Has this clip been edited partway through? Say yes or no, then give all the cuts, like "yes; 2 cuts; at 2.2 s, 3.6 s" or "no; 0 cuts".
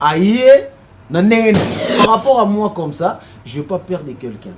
yes; 1 cut; at 1.8 s